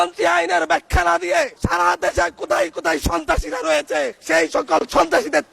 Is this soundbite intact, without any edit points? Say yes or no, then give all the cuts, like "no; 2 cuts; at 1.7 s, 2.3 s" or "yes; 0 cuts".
no; 2 cuts; at 1.6 s, 4.2 s